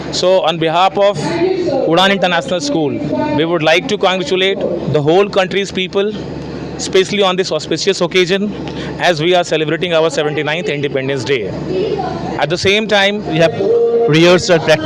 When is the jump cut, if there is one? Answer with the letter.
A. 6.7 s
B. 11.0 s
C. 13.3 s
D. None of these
C